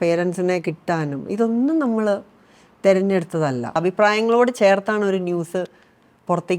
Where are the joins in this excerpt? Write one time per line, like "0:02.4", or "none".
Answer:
0:03.8